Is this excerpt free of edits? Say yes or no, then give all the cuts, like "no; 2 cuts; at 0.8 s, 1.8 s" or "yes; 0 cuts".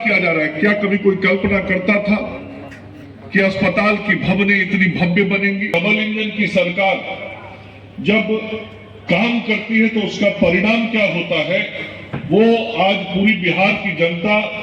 no; 1 cut; at 5.7 s